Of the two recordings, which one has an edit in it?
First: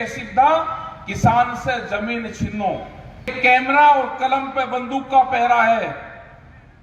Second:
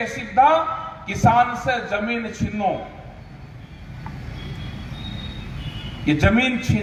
first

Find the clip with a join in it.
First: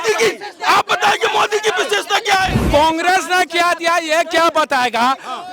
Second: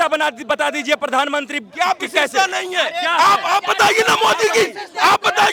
first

